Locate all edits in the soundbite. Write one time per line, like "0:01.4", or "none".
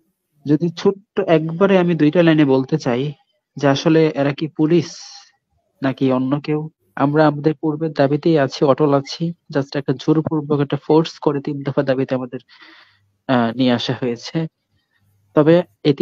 0:06.8